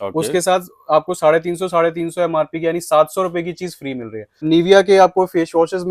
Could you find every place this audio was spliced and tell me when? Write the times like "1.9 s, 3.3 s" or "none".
4.4 s